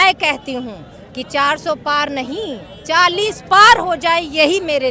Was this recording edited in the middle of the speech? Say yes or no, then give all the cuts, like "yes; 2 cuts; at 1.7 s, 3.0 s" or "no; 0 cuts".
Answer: no; 0 cuts